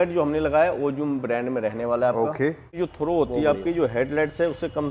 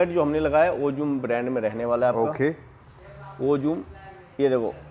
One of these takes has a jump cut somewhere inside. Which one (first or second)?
first